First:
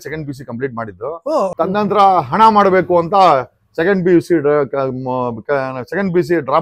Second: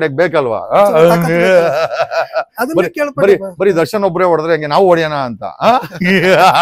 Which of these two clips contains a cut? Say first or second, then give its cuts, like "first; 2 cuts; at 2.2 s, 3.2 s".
first; 1 cut; at 1.5 s